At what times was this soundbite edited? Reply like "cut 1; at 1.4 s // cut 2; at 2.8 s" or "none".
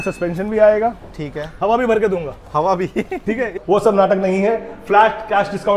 cut 1; at 3.5 s

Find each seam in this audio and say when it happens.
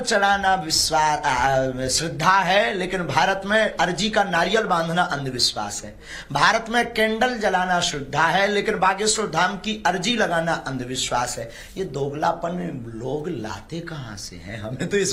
none

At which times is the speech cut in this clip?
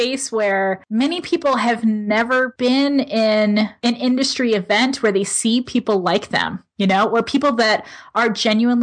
cut 1; at 0.8 s // cut 2; at 2.5 s // cut 3; at 3.7 s

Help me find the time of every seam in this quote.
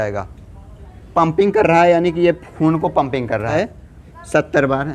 cut 1; at 1.0 s // cut 2; at 3.5 s

